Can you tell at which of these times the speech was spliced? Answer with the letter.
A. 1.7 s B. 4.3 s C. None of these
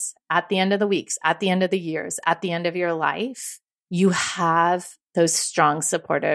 C